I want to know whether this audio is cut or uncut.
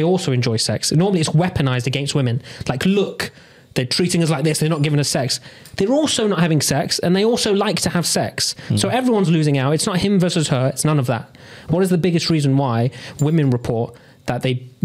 uncut